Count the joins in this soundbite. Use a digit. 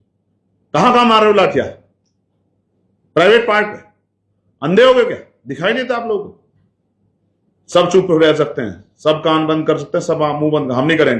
0